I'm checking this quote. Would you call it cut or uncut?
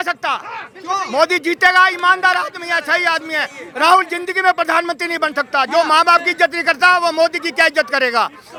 uncut